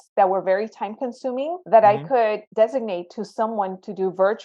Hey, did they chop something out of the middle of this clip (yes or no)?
yes